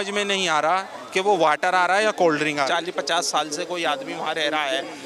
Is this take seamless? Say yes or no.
no